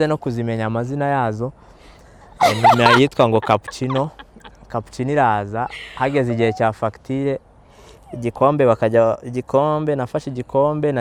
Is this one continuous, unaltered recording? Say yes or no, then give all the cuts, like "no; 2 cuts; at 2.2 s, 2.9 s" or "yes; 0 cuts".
yes; 0 cuts